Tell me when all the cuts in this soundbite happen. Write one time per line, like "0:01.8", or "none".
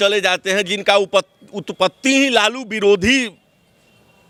none